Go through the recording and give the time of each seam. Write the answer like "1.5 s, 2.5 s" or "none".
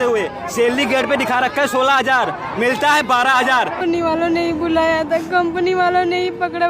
3.8 s